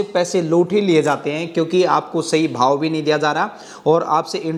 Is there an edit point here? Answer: no; 0 cuts

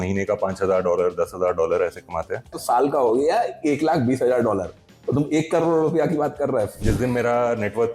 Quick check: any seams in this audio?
yes; 2 cuts; at 2.5 s, 6.8 s

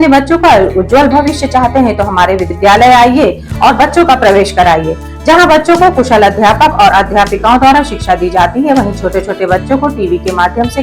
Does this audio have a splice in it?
no; 0 cuts

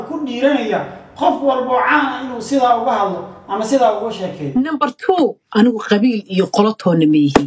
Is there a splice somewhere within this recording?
yes; 1 cut; at 4.4 s

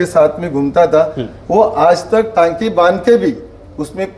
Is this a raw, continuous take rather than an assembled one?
yes; 0 cuts

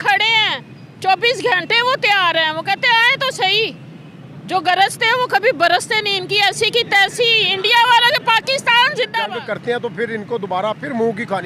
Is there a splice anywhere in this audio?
yes; 1 cut; at 9.3 s

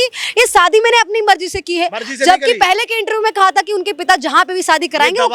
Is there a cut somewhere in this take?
no; 0 cuts

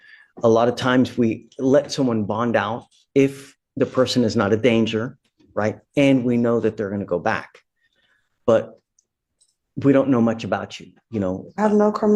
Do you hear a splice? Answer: no; 0 cuts

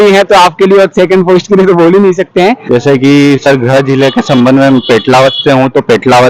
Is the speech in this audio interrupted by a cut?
yes; 1 cut; at 2.6 s

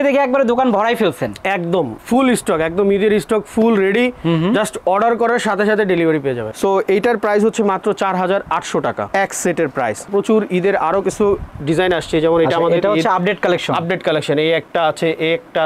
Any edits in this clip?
yes; 2 cuts; at 6.5 s, 10.1 s

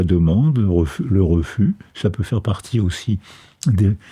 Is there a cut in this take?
no; 0 cuts

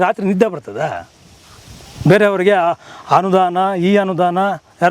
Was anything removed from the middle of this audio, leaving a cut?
no; 0 cuts

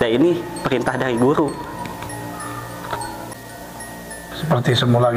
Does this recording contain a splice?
yes; 1 cut; at 3.3 s

